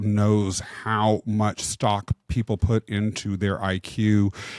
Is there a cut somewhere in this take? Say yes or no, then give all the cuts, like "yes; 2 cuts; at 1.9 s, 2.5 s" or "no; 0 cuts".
no; 0 cuts